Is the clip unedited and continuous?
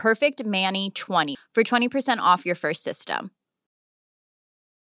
no; 1 cut; at 1.3 s

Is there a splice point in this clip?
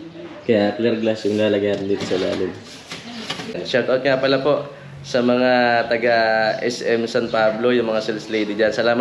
yes; 1 cut; at 3.6 s

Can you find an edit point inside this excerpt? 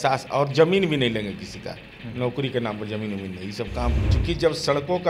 yes; 1 cut; at 4.1 s

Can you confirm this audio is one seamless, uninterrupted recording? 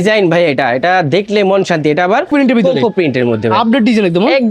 no; 1 cut; at 2.3 s

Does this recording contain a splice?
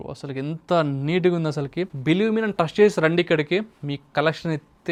no; 0 cuts

